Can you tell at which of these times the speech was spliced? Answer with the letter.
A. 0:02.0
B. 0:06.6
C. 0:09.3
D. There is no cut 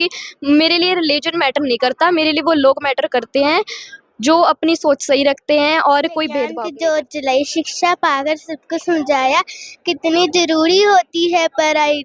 B